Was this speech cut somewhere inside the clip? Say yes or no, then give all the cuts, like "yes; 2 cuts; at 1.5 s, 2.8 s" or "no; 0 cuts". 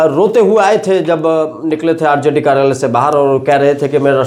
no; 0 cuts